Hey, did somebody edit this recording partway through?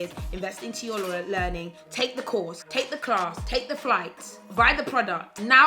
yes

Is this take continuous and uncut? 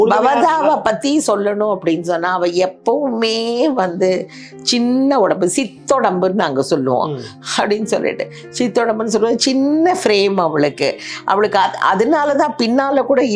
yes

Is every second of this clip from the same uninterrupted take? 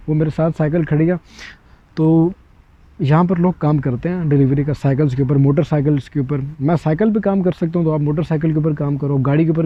yes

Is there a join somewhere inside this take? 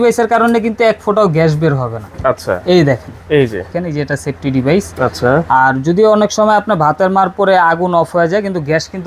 yes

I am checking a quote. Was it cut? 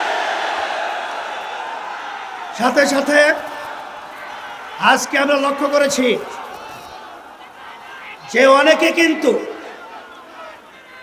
no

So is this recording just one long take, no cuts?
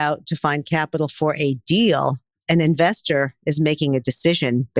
no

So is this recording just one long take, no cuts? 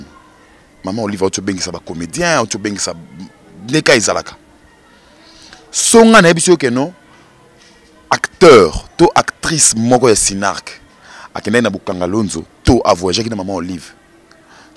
yes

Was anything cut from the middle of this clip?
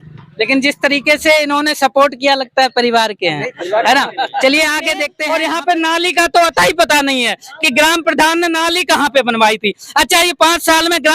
yes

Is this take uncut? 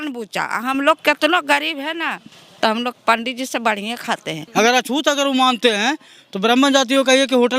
no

